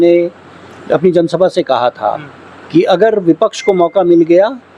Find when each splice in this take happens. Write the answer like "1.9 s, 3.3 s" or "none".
none